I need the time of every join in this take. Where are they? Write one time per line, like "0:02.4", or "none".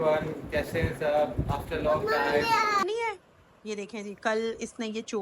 0:02.8

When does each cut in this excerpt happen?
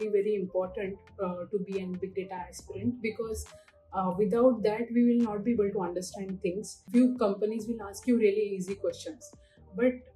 0:06.7

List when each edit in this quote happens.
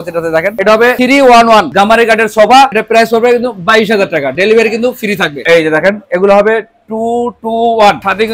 0:01.7
0:05.4

